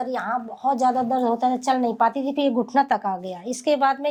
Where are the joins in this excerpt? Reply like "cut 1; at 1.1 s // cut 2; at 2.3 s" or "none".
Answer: none